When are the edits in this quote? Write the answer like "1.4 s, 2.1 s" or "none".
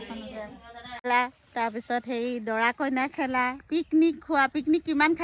1.0 s